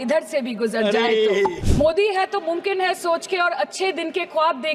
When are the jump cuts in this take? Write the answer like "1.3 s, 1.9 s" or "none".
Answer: 1.6 s